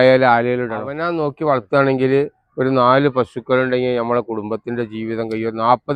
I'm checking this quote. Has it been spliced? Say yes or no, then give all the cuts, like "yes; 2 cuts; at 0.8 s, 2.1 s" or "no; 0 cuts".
yes; 1 cut; at 1.0 s